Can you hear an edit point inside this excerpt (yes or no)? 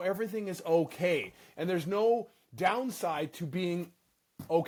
no